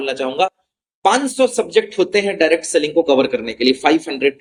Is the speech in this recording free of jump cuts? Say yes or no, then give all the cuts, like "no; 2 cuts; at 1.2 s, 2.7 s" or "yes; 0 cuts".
yes; 0 cuts